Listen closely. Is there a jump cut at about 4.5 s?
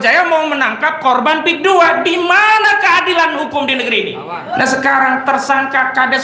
yes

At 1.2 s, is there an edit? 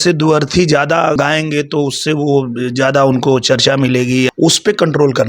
yes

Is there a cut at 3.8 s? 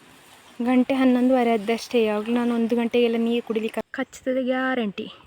yes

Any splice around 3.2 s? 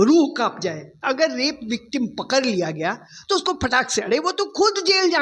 no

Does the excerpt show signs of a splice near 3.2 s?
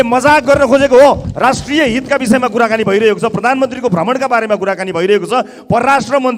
no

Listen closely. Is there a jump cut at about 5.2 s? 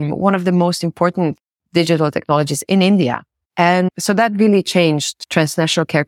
yes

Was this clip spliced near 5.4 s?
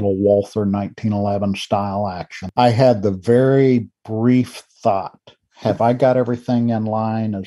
no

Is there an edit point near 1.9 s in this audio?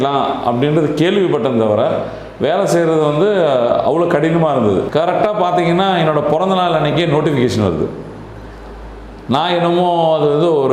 no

